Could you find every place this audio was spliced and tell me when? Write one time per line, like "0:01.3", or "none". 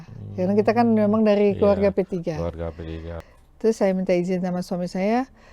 0:03.1